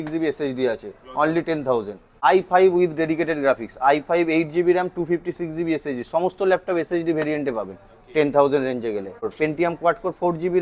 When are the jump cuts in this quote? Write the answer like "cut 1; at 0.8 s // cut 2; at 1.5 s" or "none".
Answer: cut 1; at 2.0 s // cut 2; at 9.2 s